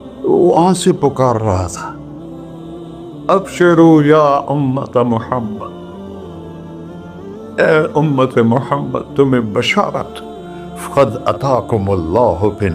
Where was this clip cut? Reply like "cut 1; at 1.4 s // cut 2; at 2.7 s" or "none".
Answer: cut 1; at 5.6 s // cut 2; at 7.5 s